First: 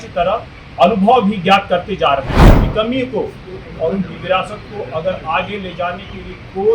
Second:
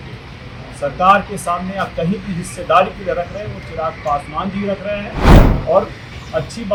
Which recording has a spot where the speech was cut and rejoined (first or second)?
first